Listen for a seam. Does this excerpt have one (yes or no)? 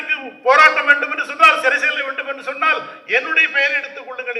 no